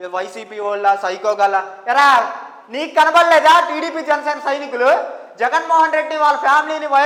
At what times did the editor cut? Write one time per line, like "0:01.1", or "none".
none